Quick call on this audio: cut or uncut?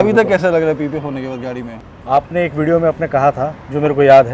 cut